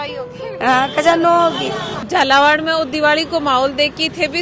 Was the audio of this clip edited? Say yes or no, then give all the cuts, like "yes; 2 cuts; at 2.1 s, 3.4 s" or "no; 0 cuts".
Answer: yes; 1 cut; at 1.9 s